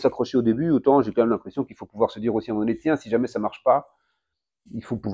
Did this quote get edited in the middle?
no; 0 cuts

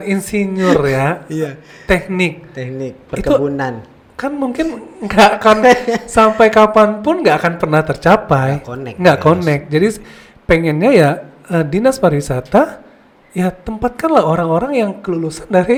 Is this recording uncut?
yes; 0 cuts

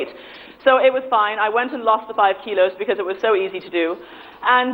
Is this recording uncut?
yes; 0 cuts

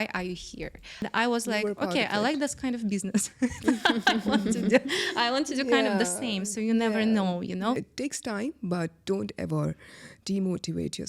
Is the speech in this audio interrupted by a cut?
yes; 2 cuts; at 1.0 s, 7.8 s

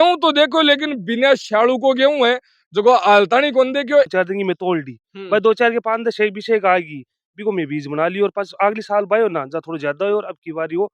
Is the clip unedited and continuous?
no; 1 cut; at 4.1 s

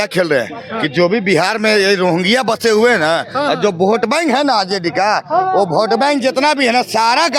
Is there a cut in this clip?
no; 0 cuts

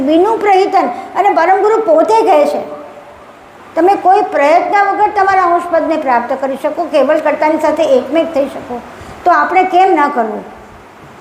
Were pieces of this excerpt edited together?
no; 0 cuts

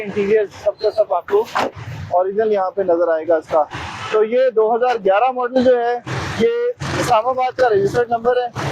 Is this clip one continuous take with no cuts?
yes; 0 cuts

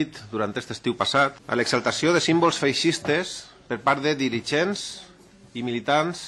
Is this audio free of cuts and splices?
no; 1 cut; at 1.4 s

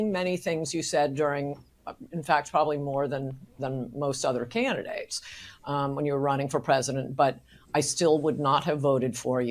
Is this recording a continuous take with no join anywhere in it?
yes; 0 cuts

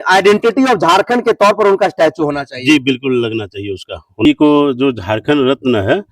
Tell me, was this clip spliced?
yes; 1 cut; at 4.3 s

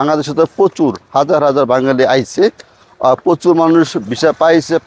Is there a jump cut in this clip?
no; 0 cuts

